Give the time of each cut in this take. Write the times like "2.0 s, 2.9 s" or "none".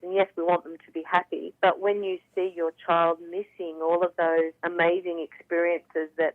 1.4 s, 4.6 s